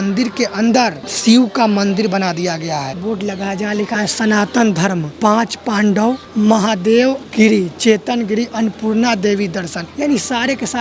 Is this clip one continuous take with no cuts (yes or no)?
no